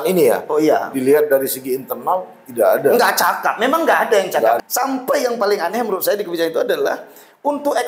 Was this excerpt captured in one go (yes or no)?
no